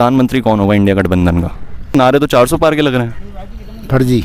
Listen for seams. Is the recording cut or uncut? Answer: cut